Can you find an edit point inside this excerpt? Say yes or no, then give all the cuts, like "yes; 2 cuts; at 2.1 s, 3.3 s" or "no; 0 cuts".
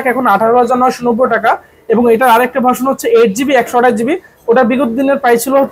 no; 0 cuts